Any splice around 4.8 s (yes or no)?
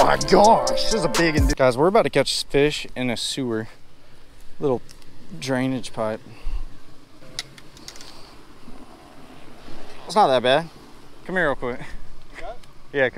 no